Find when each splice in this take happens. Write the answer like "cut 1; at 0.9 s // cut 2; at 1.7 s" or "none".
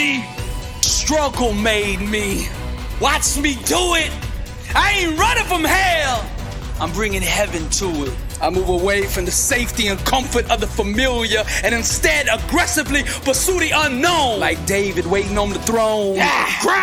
none